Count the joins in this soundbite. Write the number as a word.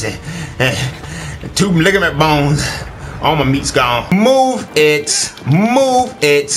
one